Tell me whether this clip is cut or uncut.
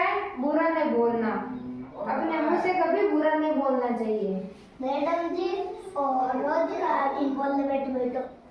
uncut